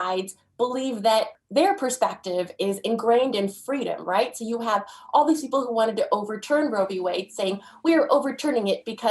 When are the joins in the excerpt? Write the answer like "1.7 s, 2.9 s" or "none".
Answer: 1.4 s